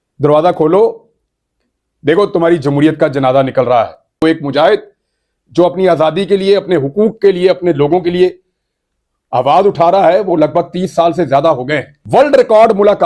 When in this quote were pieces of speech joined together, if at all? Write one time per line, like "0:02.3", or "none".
0:04.2
0:11.9